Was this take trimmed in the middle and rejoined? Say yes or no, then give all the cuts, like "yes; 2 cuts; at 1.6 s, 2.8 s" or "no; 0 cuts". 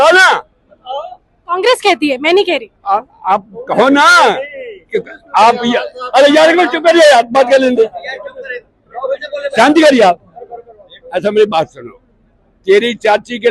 no; 0 cuts